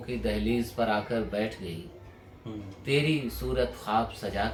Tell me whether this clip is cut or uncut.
uncut